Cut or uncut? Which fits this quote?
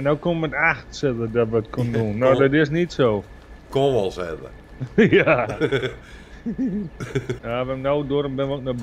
cut